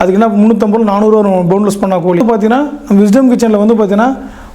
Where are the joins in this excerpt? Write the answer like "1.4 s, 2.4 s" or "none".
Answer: 2.2 s

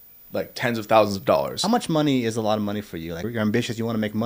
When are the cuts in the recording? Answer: 1.5 s, 3.2 s

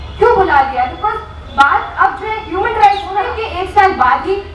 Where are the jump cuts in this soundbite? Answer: 3.4 s

